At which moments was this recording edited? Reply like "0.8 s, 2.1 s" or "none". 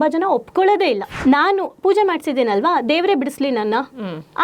1.1 s